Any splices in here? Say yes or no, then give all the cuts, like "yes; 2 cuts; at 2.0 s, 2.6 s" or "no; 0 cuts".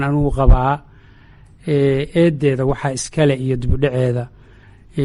no; 0 cuts